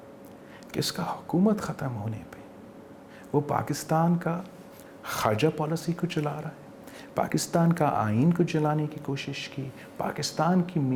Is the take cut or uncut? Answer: uncut